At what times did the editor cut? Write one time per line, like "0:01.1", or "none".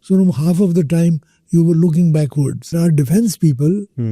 0:02.7

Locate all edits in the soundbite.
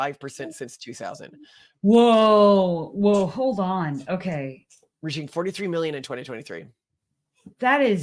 none

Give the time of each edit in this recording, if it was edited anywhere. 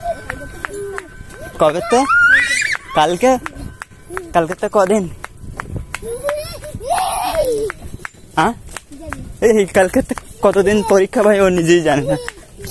none

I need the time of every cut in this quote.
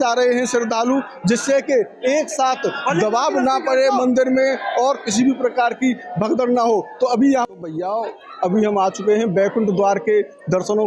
0:07.5

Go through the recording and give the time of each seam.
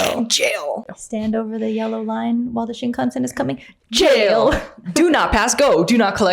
0:01.0

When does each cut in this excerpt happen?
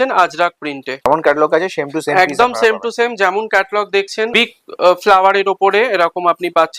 0:01.1
0:04.3

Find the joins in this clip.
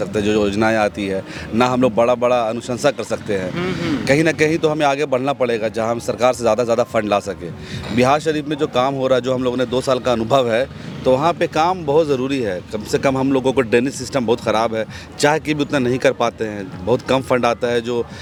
none

